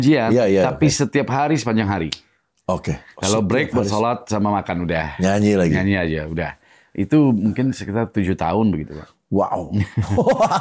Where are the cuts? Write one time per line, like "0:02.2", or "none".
none